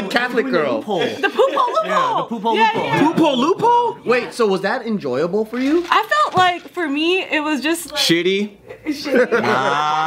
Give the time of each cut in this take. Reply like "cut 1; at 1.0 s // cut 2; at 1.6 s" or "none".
none